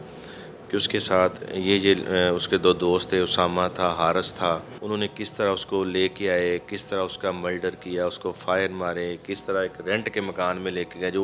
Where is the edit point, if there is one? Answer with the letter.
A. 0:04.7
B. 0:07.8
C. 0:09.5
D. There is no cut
A